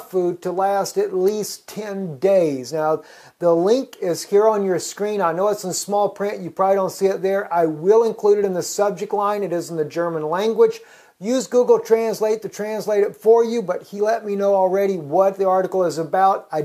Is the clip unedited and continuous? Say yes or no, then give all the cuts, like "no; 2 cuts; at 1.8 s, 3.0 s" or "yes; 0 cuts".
no; 1 cut; at 11.7 s